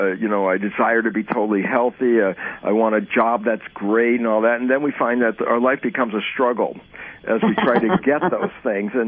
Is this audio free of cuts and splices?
yes; 0 cuts

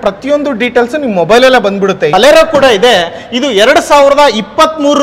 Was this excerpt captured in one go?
no; 1 cut; at 2.1 s

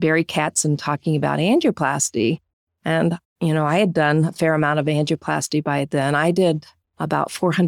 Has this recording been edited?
no; 0 cuts

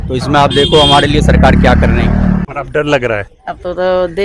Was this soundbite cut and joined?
yes; 1 cut; at 2.5 s

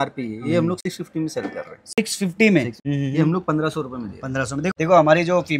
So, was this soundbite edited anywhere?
yes; 2 cuts; at 2.8 s, 4.7 s

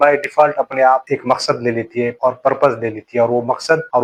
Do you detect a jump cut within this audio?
no; 0 cuts

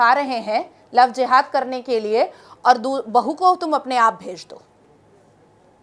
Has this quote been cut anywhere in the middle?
no; 0 cuts

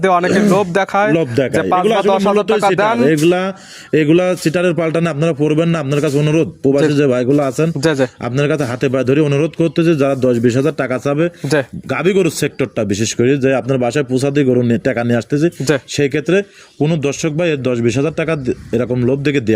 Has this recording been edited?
no; 0 cuts

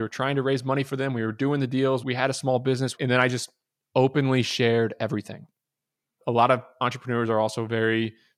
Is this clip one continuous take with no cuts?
yes; 0 cuts

